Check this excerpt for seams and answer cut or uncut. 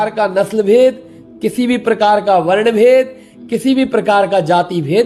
uncut